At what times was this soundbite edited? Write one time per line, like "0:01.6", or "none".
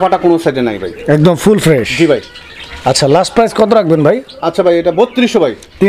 none